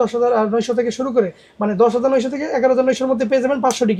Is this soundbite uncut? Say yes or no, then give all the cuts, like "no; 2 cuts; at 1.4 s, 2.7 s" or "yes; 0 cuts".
yes; 0 cuts